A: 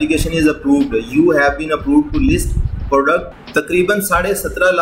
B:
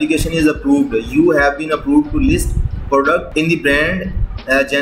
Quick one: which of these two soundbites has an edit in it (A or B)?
A